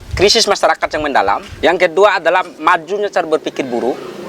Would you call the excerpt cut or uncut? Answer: cut